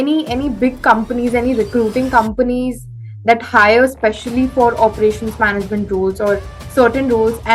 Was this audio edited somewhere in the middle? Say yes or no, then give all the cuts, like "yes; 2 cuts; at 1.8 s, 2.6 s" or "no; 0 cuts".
no; 0 cuts